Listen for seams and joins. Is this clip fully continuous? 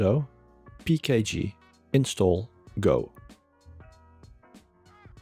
no; 1 cut; at 3.1 s

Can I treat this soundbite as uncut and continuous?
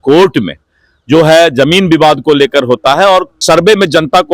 no; 1 cut; at 3.3 s

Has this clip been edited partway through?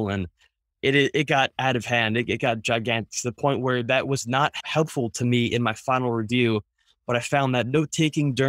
yes; 1 cut; at 4.6 s

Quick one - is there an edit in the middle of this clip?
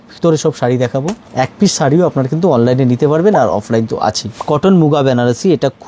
yes; 2 cuts; at 1.2 s, 4.4 s

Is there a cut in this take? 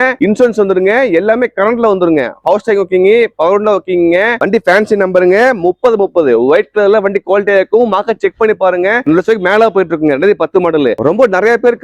no; 0 cuts

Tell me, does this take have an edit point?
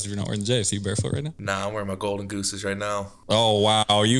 yes; 2 cuts; at 1.3 s, 3.1 s

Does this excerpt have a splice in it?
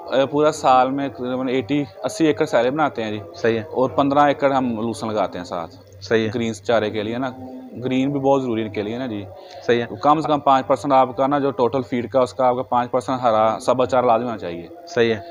no; 0 cuts

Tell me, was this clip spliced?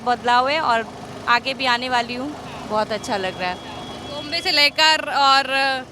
no; 0 cuts

